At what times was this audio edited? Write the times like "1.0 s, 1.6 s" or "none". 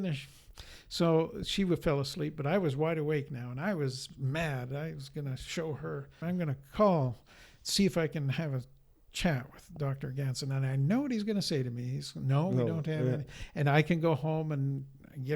6.2 s